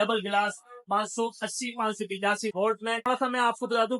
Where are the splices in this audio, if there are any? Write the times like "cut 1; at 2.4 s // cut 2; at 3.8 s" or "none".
cut 1; at 3.1 s

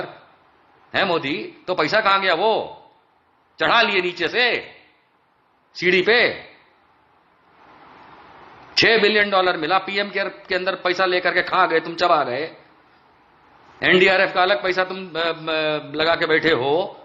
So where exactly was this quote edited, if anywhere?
none

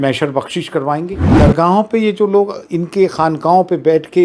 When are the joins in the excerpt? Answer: cut 1; at 1.2 s

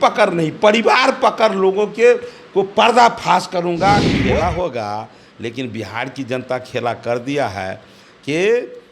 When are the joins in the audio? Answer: cut 1; at 4.2 s

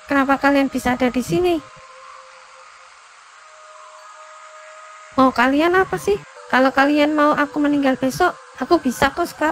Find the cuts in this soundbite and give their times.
cut 1; at 6.3 s

